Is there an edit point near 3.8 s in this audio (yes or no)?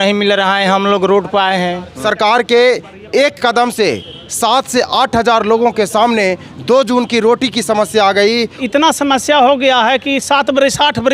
no